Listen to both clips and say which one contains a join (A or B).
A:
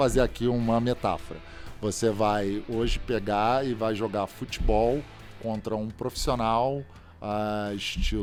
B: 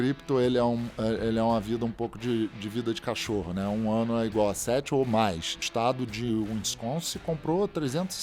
B